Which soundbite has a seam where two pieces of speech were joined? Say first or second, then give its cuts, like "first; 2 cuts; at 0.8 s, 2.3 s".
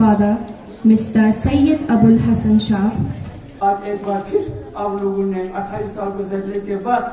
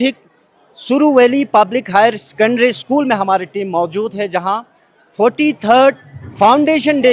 first; 1 cut; at 3.4 s